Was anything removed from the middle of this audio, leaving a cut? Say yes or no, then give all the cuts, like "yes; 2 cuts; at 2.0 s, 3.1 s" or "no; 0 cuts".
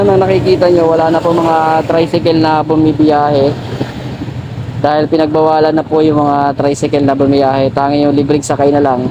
no; 0 cuts